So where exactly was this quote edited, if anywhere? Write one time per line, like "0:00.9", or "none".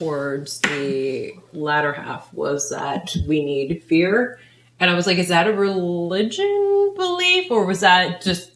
none